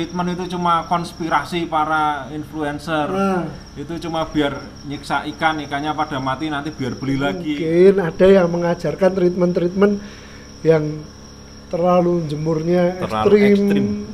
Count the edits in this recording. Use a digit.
1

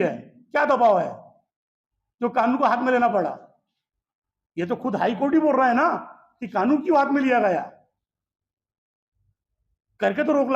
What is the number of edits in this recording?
0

